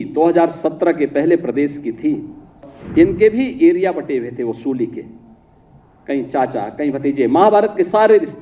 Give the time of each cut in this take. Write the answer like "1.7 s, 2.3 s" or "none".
2.7 s